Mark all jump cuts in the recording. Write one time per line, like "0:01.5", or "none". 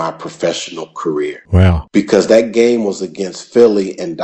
0:01.6